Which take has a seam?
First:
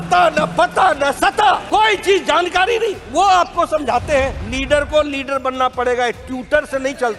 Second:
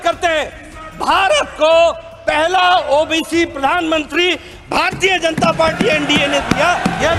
first; 2 cuts; at 1.6 s, 4.4 s

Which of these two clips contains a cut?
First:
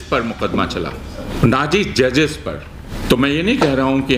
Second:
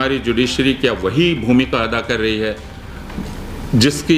first; 2 cuts; at 1.3 s, 2.9 s

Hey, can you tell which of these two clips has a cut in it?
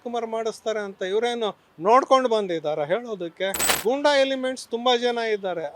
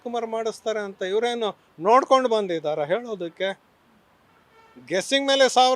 first; 1 cut; at 3.7 s

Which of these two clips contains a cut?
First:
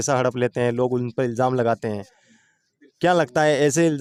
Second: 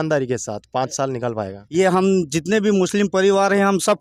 second; 1 cut; at 1.6 s

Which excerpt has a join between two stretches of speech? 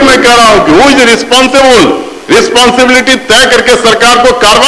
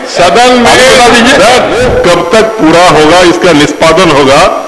second; 1 cut; at 1.8 s

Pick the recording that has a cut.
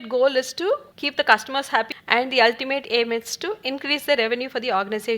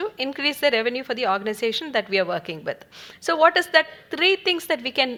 first; 2 cuts; at 1.0 s, 1.9 s

